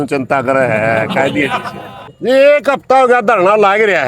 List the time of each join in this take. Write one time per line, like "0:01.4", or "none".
0:02.1